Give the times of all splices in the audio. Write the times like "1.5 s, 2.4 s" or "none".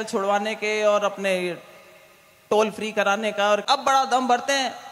3.6 s